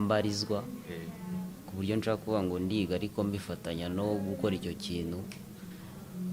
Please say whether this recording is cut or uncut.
uncut